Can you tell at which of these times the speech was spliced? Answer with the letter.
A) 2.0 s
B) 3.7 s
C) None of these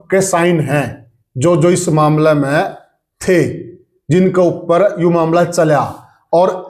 C